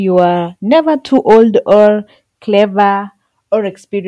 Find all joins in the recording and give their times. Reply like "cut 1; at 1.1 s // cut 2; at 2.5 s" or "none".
none